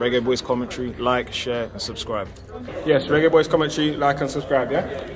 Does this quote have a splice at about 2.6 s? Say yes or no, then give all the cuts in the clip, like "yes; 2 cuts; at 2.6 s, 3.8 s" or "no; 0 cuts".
yes; 1 cut; at 2.6 s